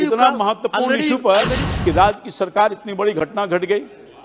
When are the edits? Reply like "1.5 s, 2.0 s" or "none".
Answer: 1.6 s

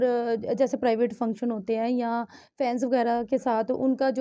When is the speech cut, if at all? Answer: none

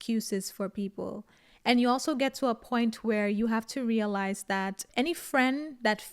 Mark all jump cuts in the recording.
4.8 s

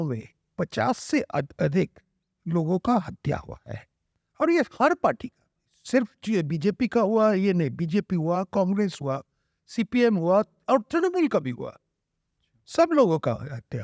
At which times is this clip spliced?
none

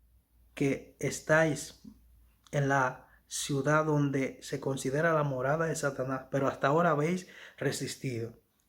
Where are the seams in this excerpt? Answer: none

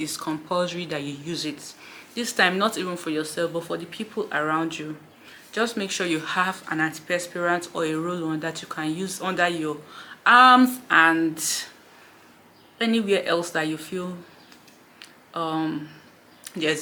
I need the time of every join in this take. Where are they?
none

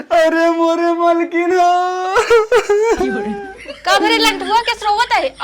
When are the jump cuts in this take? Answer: none

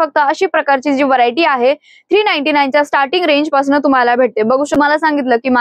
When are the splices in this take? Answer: 4.7 s

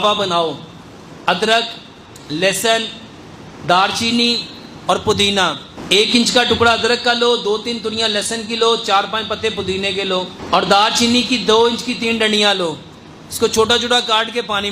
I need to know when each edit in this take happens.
5.7 s, 10.4 s

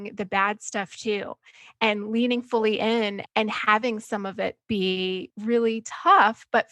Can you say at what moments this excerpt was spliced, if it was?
3.2 s, 5.3 s

